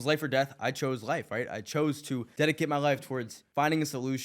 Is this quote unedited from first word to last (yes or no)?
no